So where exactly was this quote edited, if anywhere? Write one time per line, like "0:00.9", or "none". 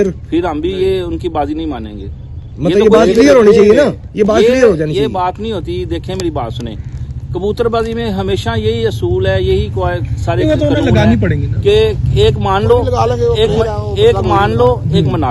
none